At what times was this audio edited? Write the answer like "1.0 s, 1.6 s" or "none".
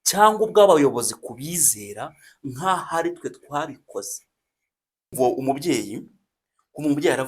5.1 s